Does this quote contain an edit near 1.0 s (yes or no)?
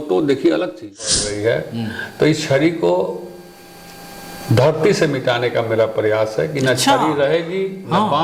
yes